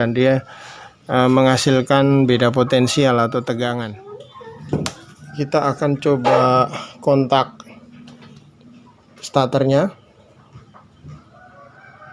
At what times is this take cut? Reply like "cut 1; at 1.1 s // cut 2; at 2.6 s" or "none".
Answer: cut 1; at 4.0 s